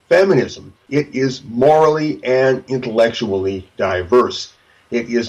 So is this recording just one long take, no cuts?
yes; 0 cuts

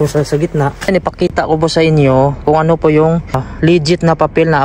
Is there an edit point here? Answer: yes; 2 cuts; at 1.0 s, 3.5 s

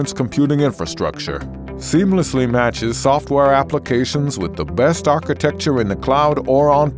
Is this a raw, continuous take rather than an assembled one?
yes; 0 cuts

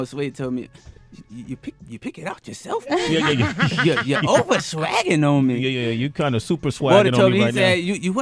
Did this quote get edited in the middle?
yes; 1 cut; at 2.3 s

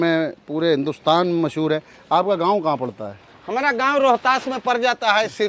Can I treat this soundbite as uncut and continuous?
yes; 0 cuts

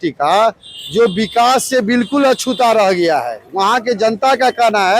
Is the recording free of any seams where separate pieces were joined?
yes; 0 cuts

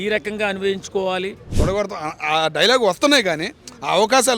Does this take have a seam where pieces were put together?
yes; 1 cut; at 1.4 s

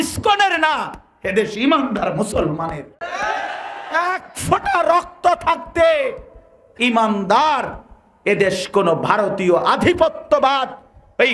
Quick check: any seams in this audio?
no; 0 cuts

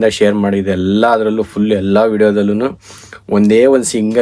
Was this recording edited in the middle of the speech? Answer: no; 0 cuts

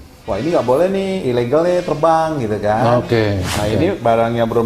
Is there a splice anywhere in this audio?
yes; 1 cut; at 3.6 s

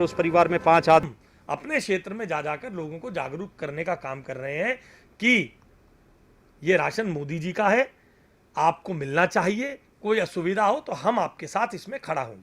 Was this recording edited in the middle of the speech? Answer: yes; 1 cut; at 1.1 s

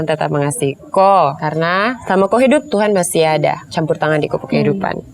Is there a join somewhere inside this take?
yes; 2 cuts; at 1.7 s, 3.7 s

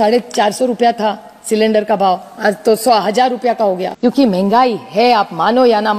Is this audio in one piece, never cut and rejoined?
no; 1 cut; at 3.9 s

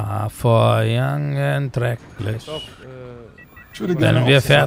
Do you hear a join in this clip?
no; 0 cuts

